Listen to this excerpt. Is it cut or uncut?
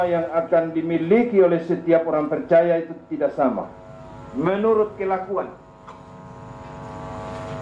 cut